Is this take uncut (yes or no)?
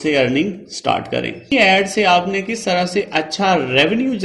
no